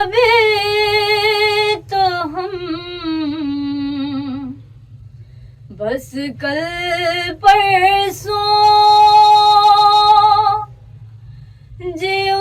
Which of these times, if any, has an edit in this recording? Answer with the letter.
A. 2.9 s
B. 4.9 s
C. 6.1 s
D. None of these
D